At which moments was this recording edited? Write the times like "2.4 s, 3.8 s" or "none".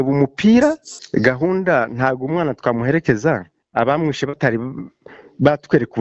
0.9 s